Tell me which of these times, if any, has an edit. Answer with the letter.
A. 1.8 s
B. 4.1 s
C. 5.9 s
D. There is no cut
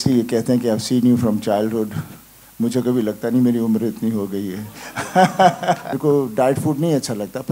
C